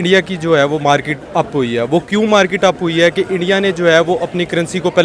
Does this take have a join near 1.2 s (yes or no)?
no